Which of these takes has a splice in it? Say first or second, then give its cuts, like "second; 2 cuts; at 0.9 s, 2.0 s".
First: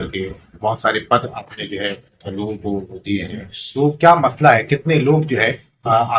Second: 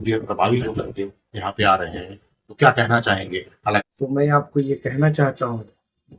second; 1 cut; at 3.8 s